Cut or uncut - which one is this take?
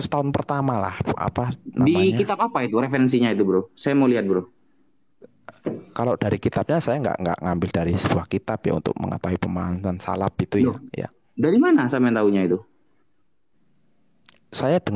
uncut